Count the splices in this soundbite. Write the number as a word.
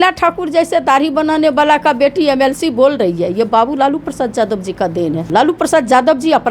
one